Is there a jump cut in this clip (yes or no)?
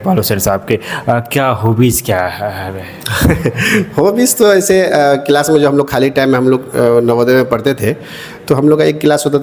no